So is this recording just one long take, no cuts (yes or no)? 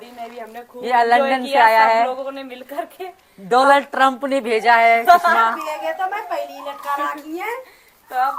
yes